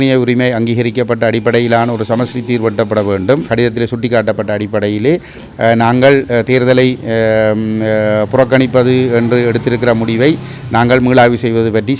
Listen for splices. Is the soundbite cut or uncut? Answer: cut